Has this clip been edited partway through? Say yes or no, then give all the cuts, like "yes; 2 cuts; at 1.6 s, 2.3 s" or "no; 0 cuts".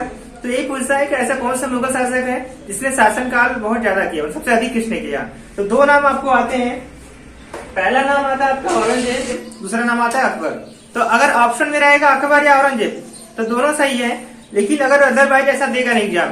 yes; 1 cut; at 9.8 s